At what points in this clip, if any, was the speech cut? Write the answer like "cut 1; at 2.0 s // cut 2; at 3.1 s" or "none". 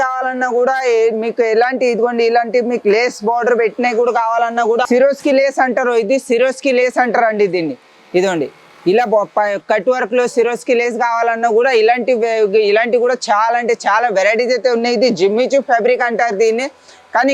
none